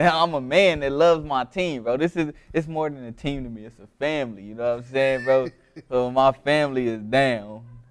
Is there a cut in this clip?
yes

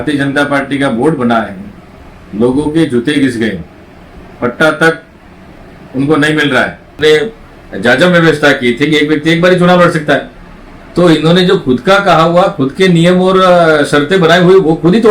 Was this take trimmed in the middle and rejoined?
yes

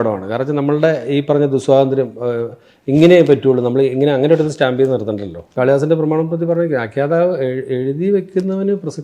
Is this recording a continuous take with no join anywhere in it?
no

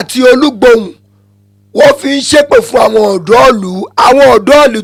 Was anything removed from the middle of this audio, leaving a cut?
no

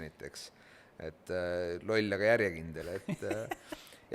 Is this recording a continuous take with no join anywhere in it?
yes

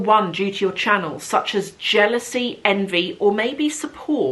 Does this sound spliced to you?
no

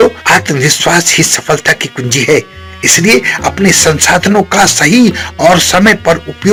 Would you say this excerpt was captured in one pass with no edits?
yes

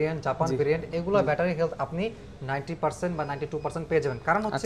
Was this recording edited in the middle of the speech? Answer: no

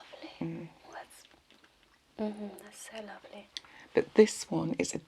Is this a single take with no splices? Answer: yes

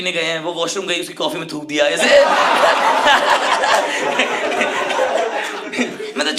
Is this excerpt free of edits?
yes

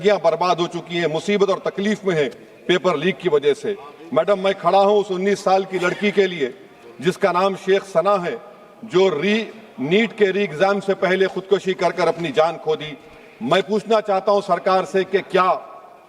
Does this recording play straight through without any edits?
yes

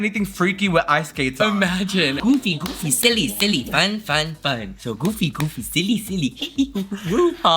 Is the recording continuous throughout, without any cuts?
no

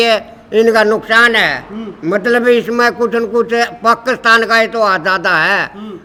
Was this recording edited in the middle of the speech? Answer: no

